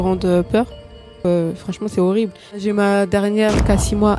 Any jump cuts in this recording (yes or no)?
yes